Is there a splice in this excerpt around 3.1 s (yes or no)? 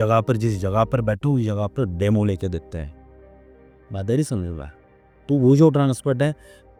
no